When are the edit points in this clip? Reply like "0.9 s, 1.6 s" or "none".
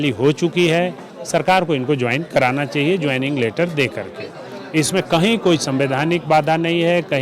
none